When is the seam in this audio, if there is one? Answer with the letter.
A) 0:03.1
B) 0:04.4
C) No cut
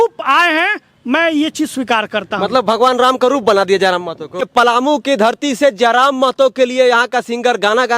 B